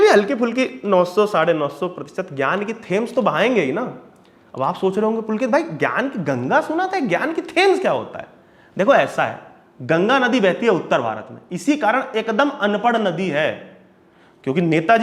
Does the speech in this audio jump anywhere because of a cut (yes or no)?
no